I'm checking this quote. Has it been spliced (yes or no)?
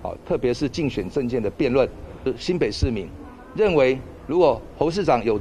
yes